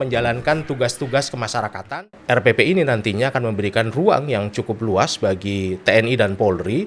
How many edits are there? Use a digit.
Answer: 1